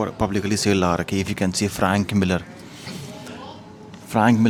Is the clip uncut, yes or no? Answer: yes